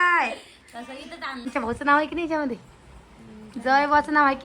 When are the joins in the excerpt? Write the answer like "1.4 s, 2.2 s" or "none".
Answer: 1.5 s